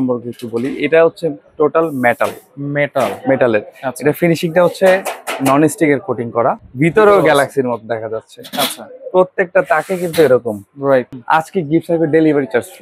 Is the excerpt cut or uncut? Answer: cut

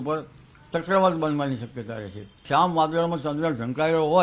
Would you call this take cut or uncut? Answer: cut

